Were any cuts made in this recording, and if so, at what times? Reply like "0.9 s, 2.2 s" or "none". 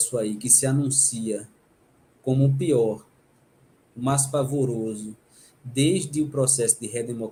none